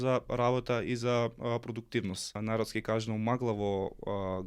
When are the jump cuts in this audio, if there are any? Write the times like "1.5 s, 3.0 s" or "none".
2.4 s

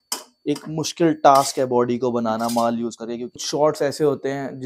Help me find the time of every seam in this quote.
3.4 s

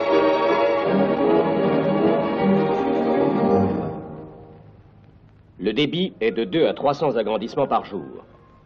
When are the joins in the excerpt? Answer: none

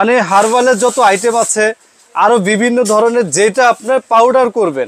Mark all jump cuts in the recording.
none

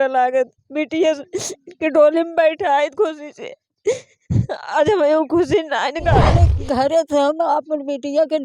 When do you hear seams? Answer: 6.5 s

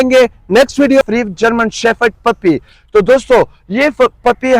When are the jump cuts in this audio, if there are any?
1.0 s

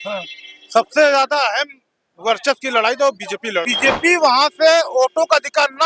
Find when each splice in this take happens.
3.7 s

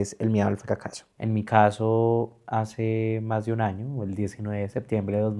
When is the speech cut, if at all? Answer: 1.1 s

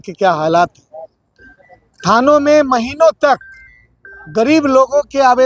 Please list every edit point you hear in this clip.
none

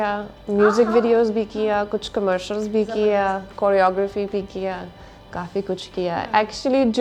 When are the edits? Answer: none

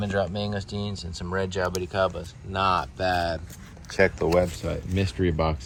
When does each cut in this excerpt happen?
none

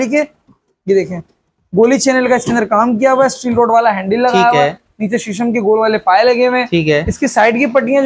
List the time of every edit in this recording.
none

